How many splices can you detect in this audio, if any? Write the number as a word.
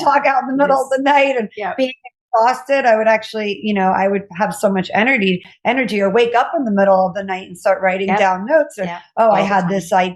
zero